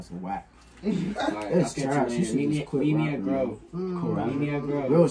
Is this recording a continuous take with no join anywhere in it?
yes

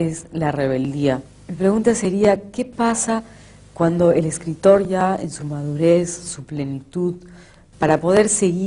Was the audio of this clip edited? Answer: no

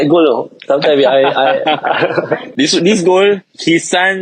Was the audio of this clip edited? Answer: yes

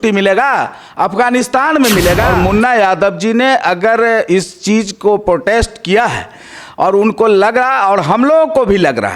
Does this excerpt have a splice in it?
yes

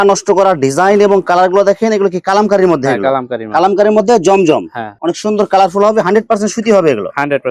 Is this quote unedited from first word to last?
yes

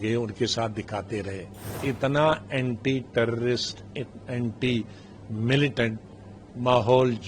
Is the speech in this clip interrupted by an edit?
yes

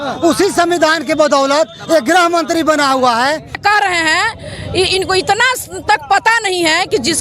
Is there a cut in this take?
yes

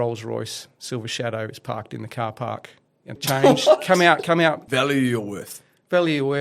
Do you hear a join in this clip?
yes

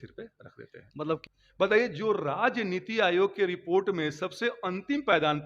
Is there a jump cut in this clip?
yes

